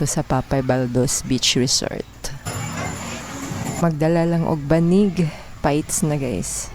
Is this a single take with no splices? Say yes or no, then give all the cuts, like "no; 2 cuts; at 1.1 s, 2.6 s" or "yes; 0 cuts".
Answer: no; 1 cut; at 3.8 s